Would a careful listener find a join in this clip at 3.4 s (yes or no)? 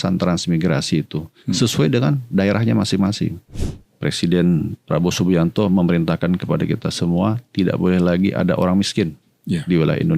yes